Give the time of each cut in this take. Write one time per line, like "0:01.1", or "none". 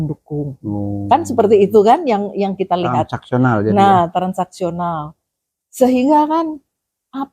none